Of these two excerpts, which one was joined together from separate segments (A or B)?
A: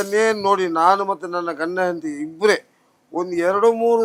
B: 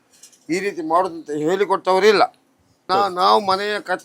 B